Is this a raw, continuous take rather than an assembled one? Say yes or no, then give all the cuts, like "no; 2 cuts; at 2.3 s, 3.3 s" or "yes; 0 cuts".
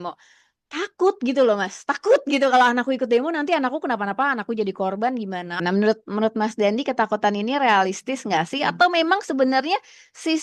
no; 1 cut; at 5.5 s